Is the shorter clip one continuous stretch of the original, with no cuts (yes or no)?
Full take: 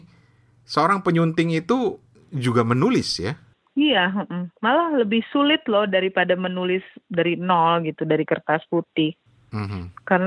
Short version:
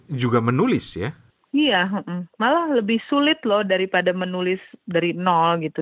yes